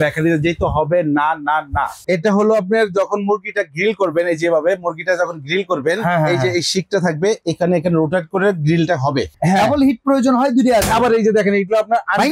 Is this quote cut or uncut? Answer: cut